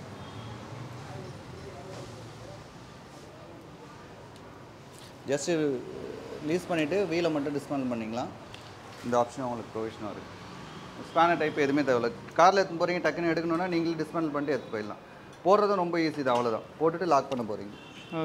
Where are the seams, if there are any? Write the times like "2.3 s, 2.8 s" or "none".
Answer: none